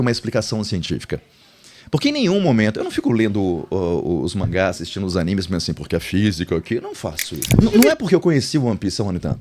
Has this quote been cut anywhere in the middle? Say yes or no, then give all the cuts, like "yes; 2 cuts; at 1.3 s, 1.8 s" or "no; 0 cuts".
yes; 1 cut; at 7.6 s